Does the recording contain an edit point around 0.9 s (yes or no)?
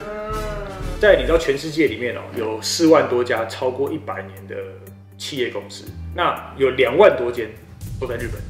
yes